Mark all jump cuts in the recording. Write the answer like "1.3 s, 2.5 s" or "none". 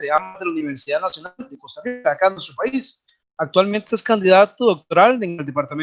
none